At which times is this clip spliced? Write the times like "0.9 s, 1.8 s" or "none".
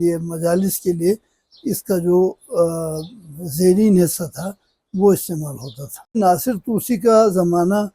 6.2 s